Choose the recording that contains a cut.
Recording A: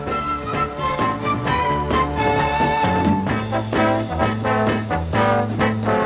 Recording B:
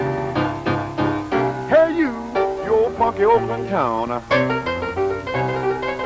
B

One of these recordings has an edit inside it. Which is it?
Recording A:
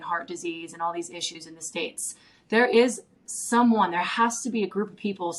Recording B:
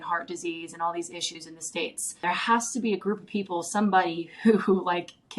B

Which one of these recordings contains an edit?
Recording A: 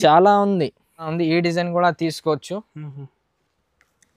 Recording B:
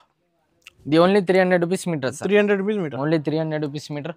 A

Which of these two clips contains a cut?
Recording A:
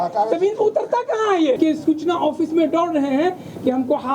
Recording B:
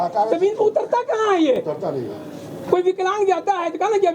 A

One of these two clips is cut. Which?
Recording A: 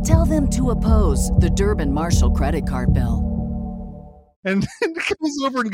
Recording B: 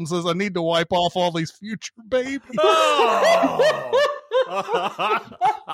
A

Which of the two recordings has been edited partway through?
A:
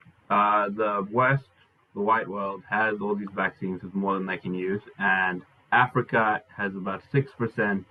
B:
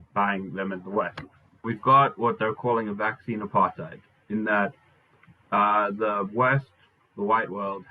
B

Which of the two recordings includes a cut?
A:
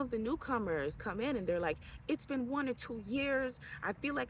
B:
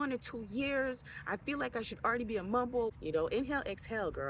B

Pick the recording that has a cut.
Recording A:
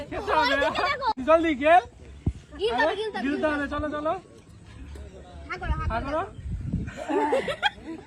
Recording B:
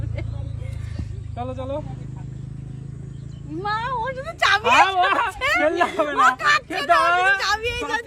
A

